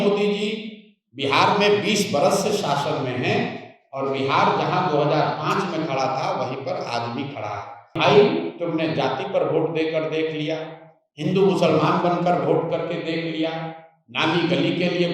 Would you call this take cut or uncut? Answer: cut